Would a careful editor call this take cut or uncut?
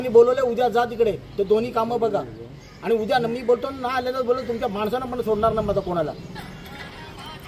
uncut